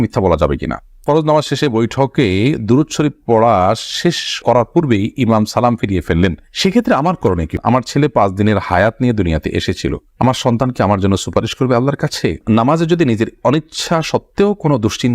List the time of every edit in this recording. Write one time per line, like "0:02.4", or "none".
0:00.9
0:07.5
0:12.4